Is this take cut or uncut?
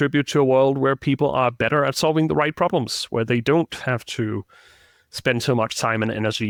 uncut